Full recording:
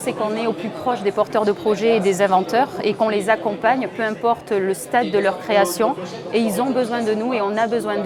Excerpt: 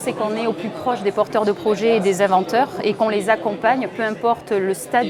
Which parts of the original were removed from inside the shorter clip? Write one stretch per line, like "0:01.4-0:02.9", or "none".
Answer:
none

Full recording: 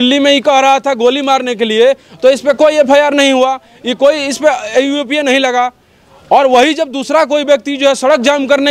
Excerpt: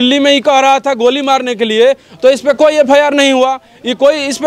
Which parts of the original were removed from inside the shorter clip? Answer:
none

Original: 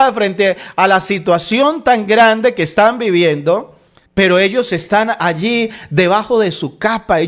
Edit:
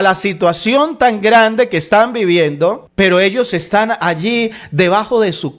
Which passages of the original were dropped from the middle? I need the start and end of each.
0:03.7-0:04.0

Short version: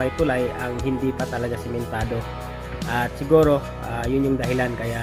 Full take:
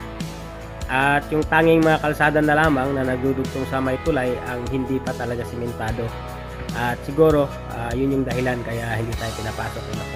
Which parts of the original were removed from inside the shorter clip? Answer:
none

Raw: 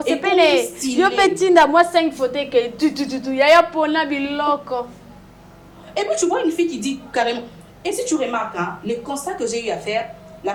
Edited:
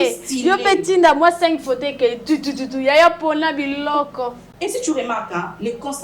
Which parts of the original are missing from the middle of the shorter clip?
0:05.0-0:07.7

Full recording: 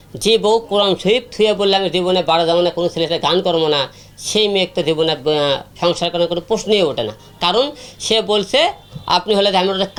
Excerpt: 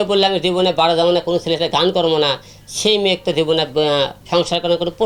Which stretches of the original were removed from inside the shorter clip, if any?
none

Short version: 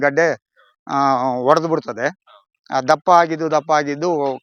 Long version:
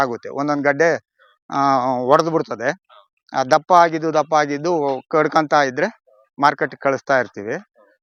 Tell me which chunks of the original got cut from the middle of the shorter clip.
none

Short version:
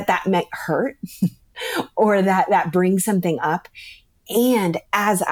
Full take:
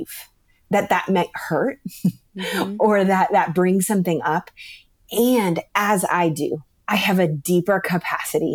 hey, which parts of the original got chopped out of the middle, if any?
none

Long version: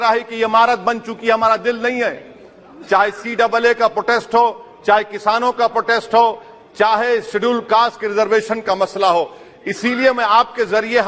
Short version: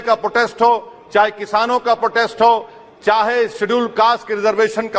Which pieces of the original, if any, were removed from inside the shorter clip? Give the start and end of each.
none

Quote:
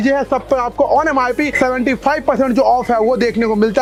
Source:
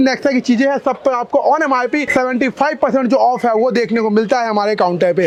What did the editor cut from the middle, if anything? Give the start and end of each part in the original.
none

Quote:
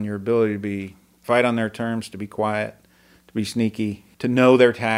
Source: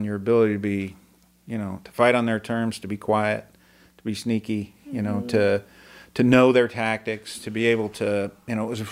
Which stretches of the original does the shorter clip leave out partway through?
0:01.1-0:01.8
0:04.8-0:06.0

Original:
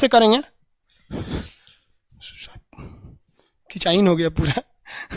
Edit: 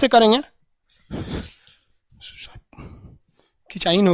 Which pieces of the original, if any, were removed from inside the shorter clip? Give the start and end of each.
none

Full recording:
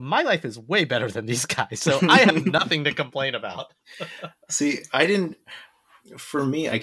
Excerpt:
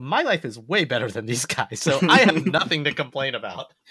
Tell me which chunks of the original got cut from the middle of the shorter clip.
none

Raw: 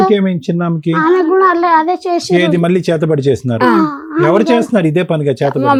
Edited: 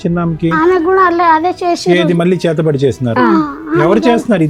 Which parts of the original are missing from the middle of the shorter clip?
none

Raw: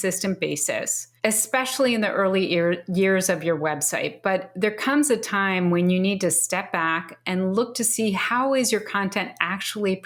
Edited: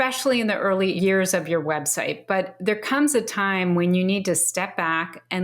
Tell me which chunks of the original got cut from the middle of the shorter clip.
0:02.5-0:02.9

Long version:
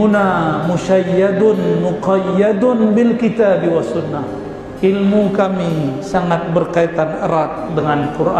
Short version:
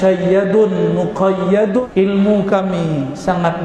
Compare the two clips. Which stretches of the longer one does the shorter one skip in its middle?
0:02.7-0:04.7

